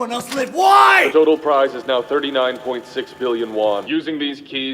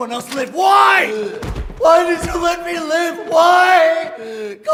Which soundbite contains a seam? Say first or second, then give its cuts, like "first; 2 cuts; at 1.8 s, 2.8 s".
first; 2 cuts; at 1.1 s, 3.8 s